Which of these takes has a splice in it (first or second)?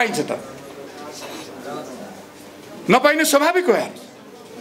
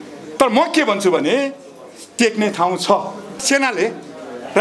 second